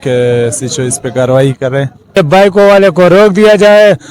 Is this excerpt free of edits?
no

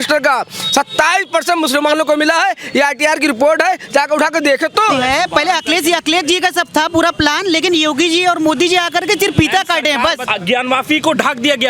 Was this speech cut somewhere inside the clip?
yes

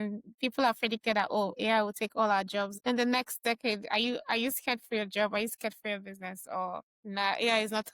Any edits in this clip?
yes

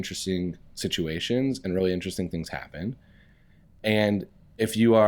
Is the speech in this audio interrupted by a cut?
no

